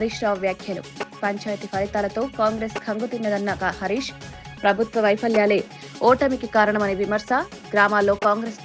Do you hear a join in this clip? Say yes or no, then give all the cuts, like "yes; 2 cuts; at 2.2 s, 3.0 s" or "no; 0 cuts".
no; 0 cuts